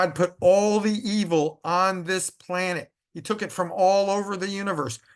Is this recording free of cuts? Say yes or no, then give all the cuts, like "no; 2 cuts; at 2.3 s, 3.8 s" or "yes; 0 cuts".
yes; 0 cuts